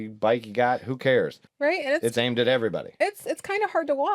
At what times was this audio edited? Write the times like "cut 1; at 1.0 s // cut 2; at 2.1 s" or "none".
cut 1; at 1.4 s